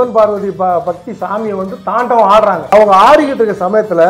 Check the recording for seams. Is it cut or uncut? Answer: uncut